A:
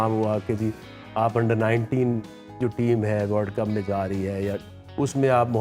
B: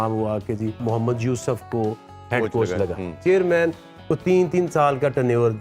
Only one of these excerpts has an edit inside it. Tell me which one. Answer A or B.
B